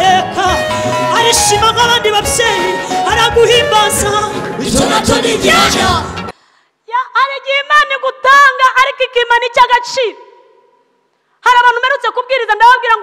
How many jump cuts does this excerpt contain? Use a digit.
1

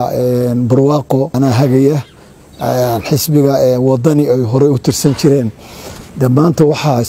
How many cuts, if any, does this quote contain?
1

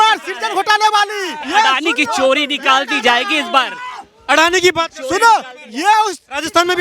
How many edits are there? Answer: 1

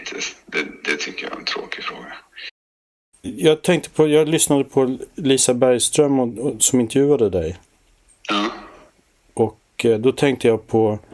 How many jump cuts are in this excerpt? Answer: 1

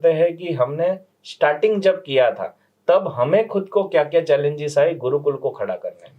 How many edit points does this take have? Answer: 0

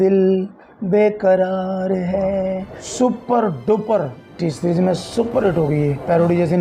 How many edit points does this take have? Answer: 2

